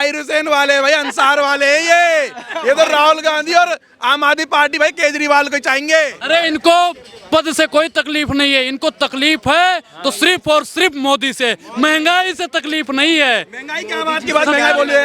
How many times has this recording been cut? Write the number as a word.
one